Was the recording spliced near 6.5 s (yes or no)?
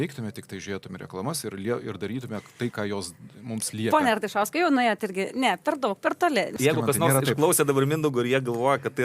yes